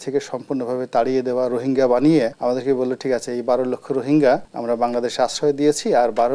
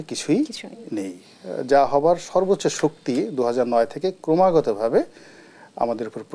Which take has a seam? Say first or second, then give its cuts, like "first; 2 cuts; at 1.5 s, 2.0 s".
first; 2 cuts; at 2.4 s, 4.5 s